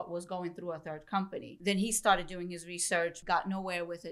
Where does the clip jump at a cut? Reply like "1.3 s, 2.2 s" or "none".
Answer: 1.5 s, 3.2 s